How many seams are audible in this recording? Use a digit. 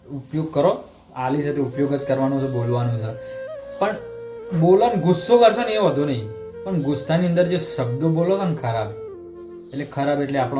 0